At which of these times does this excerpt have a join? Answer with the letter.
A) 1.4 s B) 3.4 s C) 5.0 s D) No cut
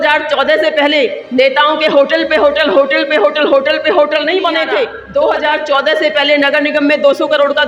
C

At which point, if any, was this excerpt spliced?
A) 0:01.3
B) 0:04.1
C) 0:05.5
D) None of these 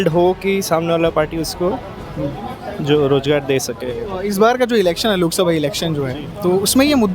B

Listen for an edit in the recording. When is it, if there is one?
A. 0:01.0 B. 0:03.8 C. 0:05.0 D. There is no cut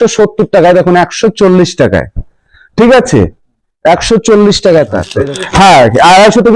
C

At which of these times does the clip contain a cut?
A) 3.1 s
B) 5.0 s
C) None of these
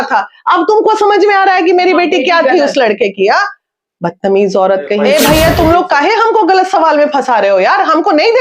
B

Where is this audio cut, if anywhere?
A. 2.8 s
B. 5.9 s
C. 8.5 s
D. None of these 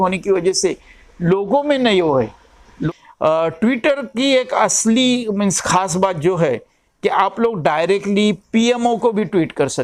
A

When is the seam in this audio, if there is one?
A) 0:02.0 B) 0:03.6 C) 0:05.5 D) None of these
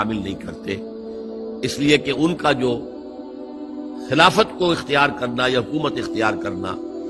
D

